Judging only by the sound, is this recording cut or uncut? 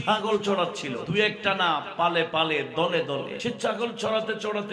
cut